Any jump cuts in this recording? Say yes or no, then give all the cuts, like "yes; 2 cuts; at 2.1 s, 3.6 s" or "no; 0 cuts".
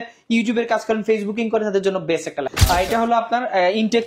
yes; 1 cut; at 2.4 s